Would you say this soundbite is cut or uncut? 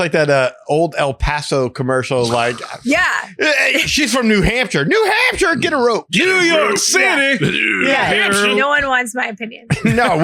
uncut